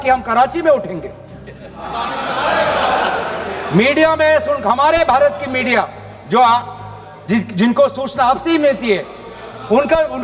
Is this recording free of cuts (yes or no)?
yes